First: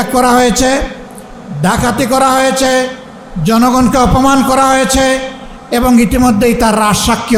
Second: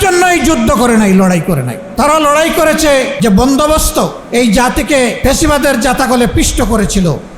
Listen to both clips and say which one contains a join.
second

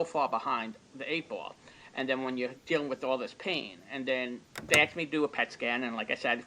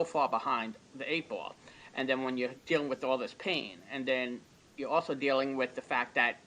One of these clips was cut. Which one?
first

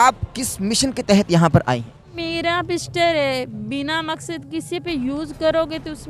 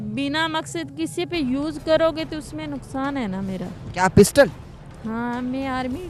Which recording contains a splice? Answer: first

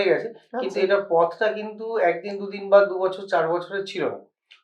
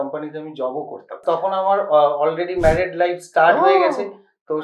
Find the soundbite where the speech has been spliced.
second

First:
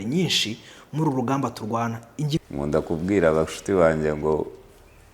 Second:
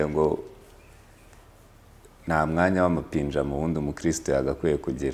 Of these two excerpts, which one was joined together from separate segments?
first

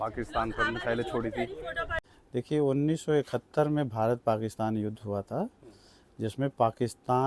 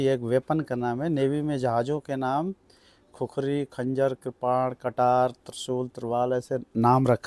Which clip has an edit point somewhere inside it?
first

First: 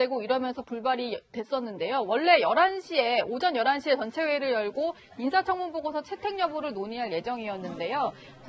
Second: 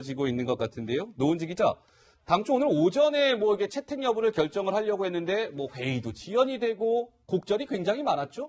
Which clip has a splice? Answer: first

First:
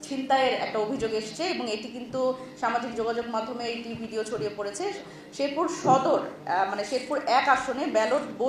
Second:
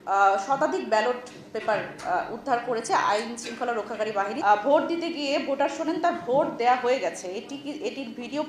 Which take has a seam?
second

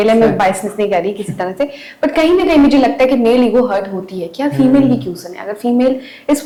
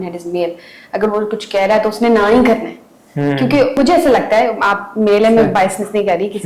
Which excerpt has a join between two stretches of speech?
second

